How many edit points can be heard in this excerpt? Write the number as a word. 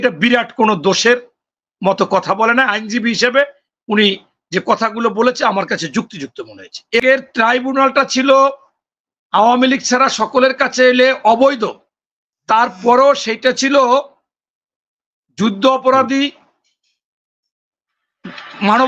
one